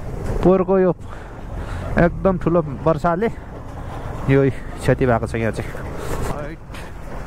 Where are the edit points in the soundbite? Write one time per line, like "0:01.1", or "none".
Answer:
0:06.3